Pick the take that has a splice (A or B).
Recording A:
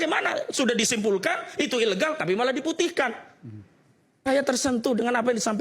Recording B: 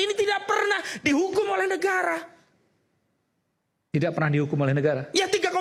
A